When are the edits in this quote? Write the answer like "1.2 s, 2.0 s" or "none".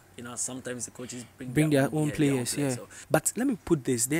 2.9 s